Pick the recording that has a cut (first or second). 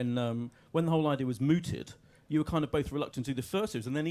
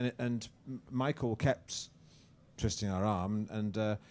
first